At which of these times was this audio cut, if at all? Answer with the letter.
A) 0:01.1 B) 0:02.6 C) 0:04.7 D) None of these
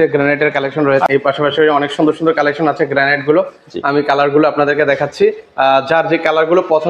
A